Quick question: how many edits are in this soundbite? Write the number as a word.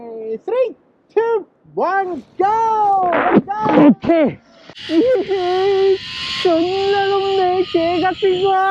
one